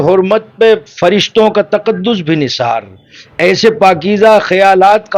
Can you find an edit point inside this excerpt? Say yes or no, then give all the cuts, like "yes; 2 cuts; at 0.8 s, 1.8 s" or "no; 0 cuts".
no; 0 cuts